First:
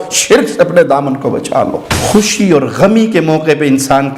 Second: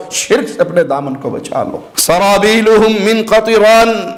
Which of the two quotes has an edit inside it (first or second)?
first